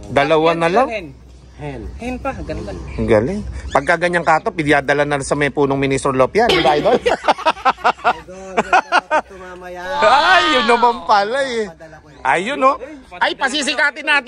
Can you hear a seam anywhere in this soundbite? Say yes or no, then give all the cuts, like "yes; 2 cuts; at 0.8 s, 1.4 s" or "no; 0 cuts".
no; 0 cuts